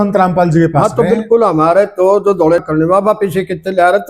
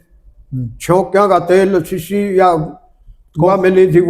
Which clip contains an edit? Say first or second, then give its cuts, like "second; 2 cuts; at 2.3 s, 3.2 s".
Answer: first; 1 cut; at 2.6 s